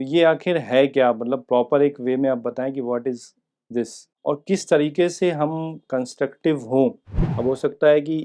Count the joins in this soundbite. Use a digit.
1